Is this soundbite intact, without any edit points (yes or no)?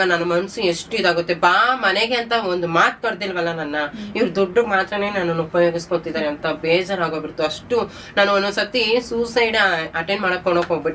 yes